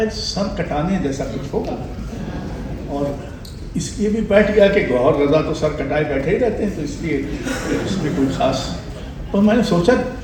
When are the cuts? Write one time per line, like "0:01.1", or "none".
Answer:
none